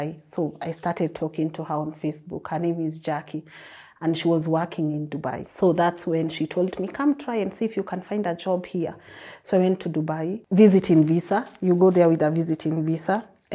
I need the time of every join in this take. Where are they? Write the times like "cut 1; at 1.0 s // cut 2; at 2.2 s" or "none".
none

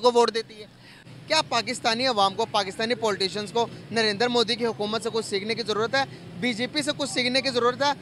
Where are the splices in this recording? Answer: cut 1; at 1.1 s

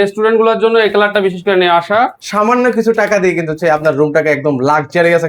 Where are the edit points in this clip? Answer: cut 1; at 2.2 s

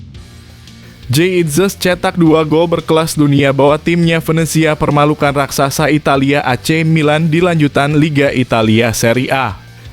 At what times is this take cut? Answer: cut 1; at 1.0 s

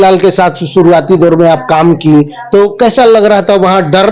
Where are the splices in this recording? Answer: none

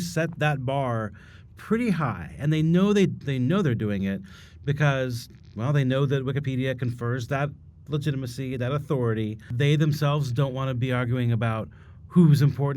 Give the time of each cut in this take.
cut 1; at 9.5 s

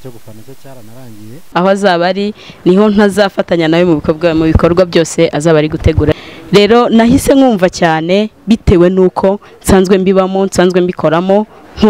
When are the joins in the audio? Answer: cut 1; at 1.4 s // cut 2; at 6.1 s

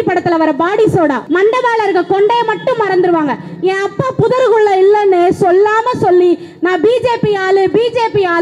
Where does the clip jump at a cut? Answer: cut 1; at 1.2 s

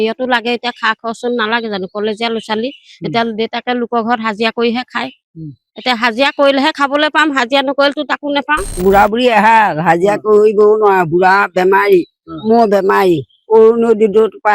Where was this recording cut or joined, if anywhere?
cut 1; at 8.7 s

